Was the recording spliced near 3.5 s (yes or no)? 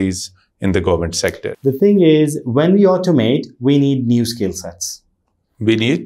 no